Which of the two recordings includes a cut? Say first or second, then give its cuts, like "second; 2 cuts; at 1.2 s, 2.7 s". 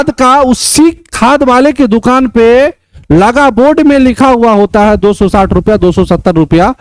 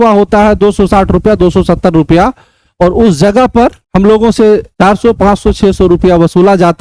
second; 2 cuts; at 3.8 s, 4.7 s